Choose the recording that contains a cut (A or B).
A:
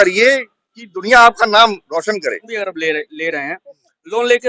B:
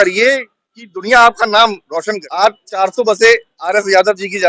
A